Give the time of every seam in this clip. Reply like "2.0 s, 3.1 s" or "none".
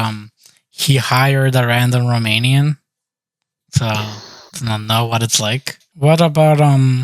5.8 s